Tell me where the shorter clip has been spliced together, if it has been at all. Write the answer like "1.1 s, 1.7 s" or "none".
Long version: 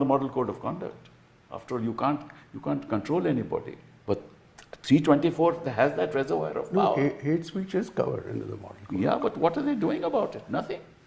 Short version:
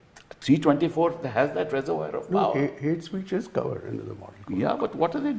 none